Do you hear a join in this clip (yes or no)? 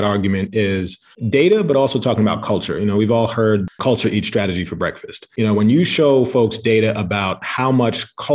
yes